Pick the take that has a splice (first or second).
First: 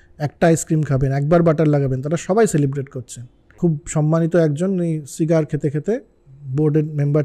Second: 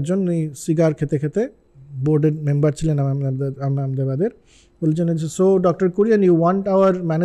first